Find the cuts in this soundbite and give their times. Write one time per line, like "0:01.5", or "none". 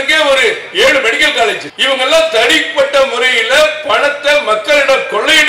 0:01.7